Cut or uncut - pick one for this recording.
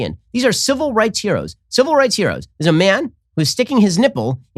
uncut